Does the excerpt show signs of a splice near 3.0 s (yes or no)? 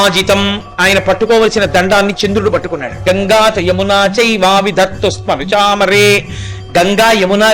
yes